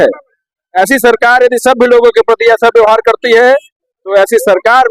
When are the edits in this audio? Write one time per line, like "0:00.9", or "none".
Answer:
none